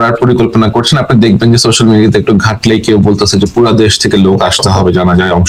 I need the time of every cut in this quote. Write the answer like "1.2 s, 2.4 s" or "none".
none